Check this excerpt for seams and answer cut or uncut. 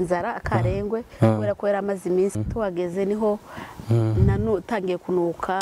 cut